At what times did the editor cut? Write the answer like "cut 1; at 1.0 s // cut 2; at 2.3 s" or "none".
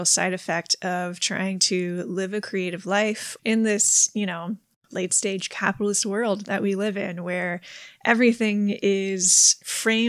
cut 1; at 3.3 s